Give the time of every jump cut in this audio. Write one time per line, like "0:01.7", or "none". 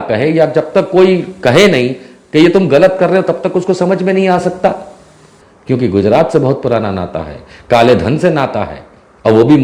0:05.2